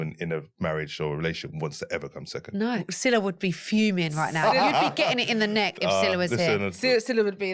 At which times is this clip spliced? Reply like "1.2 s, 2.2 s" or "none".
2.8 s